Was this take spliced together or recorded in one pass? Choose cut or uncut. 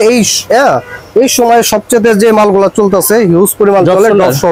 uncut